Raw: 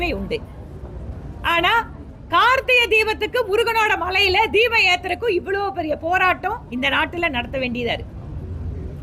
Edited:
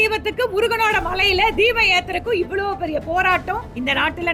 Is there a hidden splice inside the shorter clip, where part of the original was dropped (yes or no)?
no